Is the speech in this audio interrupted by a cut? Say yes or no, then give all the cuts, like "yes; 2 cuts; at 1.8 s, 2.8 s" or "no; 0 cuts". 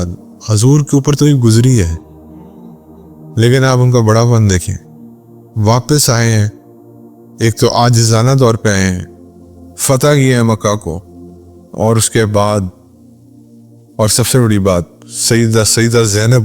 yes; 2 cuts; at 2.0 s, 3.3 s